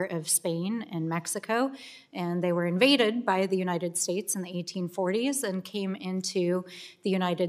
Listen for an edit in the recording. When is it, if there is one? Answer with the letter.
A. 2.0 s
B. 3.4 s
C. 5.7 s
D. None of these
B